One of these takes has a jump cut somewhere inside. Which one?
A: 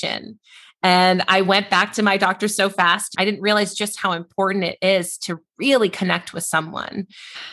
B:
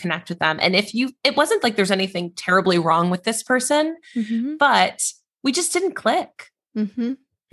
A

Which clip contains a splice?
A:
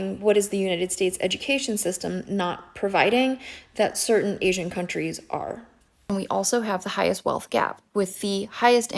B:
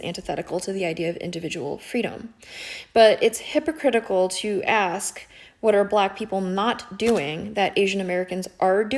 A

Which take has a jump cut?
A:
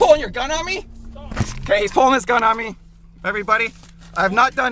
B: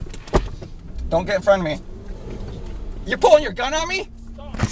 A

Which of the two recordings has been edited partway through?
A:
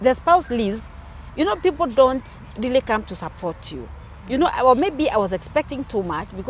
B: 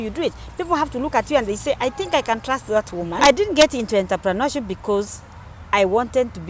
B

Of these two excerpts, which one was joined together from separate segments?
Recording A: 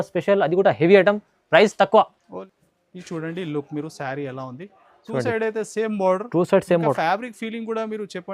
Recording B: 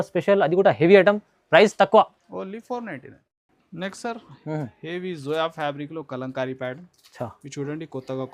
A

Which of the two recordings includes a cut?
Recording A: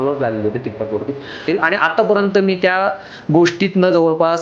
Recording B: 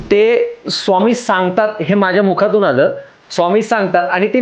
A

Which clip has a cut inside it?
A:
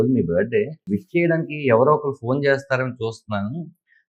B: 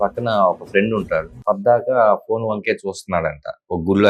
B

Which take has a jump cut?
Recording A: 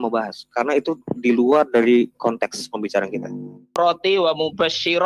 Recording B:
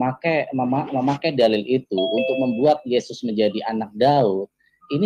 A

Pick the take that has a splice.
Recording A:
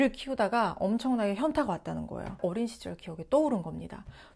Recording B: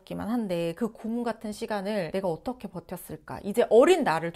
A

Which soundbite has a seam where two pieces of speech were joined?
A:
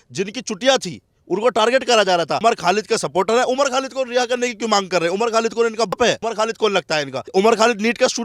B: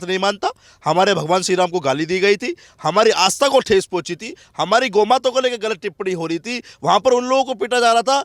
A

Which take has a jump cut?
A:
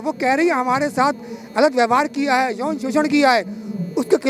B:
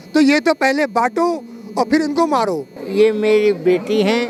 B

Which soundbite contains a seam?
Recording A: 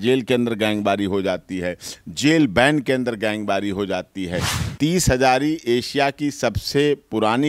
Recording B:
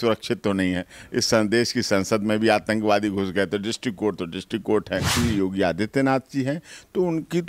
B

